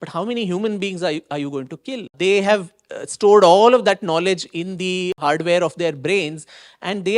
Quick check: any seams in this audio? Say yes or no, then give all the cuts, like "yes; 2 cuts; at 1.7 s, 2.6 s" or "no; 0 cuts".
yes; 2 cuts; at 2.1 s, 5.2 s